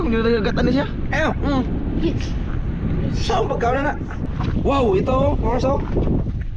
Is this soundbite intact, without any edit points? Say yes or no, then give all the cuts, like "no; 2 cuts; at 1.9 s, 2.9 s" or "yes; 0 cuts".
no; 1 cut; at 4.2 s